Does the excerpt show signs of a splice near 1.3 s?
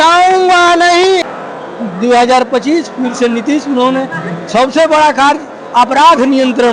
yes; 1 cut; at 1.3 s

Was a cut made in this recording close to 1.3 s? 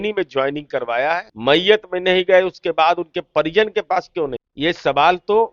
yes; 2 cuts; at 1.3 s, 4.4 s

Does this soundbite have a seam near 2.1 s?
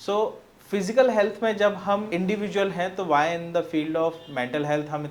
yes; 1 cut; at 2.1 s

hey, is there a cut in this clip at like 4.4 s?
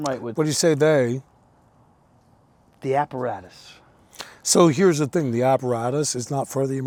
no; 0 cuts

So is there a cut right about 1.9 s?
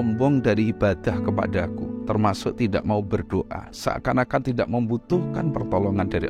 yes; 1 cut; at 1.9 s

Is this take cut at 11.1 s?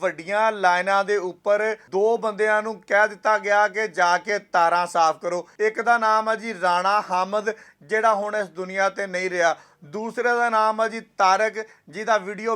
no; 2 cuts; at 1.8 s, 5.5 s

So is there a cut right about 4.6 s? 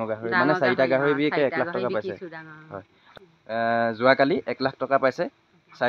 no; 1 cut; at 3.0 s

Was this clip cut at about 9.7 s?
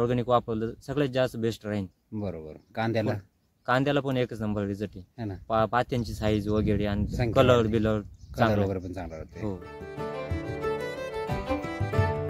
yes; 1 cut; at 9.7 s

